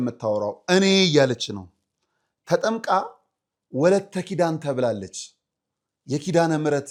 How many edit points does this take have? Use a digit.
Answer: 0